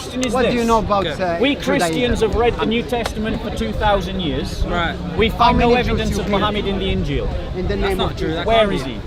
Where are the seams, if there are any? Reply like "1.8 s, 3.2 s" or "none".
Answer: none